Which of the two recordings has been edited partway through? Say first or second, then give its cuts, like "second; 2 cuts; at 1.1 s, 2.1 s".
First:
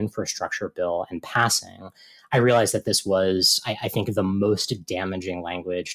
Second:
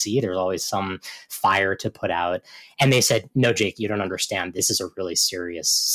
second; 1 cut; at 4.6 s